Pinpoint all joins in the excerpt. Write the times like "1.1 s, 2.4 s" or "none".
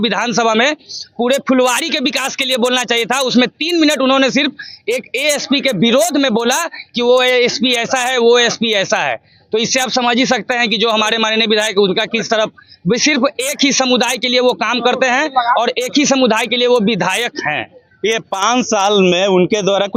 none